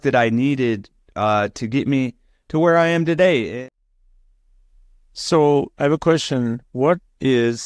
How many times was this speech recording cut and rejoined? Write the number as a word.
one